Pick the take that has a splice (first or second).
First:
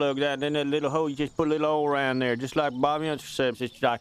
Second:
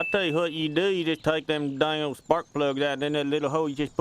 second